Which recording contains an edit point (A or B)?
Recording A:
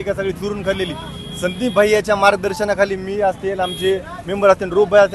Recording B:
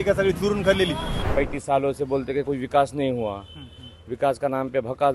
B